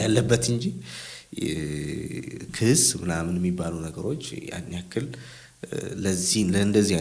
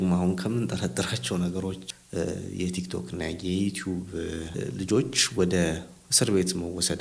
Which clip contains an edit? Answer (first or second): second